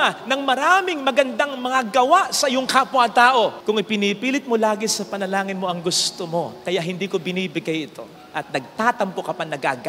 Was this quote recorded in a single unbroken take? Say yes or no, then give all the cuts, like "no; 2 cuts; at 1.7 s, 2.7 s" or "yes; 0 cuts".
yes; 0 cuts